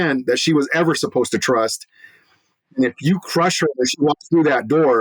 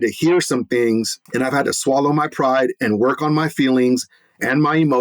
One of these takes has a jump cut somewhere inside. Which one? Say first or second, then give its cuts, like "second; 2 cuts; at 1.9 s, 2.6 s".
second; 1 cut; at 1.2 s